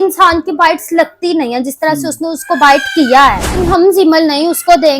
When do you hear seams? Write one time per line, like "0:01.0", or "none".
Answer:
0:03.6